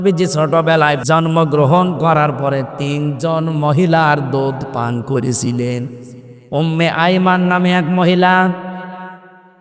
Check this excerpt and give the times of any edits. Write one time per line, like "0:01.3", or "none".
0:01.0